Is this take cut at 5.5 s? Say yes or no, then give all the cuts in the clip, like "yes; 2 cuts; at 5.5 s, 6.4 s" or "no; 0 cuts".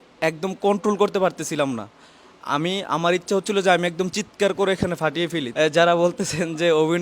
yes; 1 cut; at 5.5 s